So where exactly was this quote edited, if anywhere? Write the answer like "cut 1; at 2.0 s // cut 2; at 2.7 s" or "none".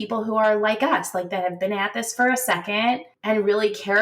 cut 1; at 3.1 s

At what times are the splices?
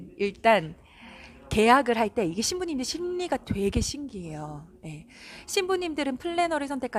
none

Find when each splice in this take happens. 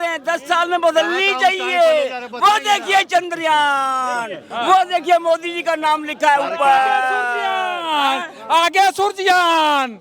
cut 1; at 4.4 s

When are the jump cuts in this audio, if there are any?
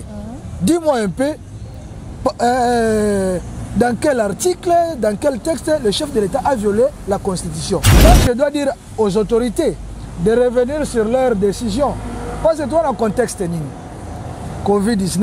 cut 1; at 8.0 s

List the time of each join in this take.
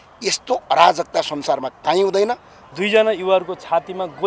cut 1; at 2.5 s

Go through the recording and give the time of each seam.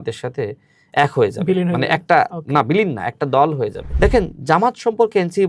cut 1; at 3.8 s

